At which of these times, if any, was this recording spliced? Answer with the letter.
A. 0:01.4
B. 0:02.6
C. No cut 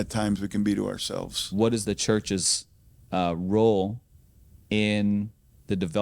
A